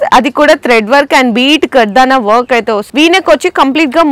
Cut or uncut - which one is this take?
cut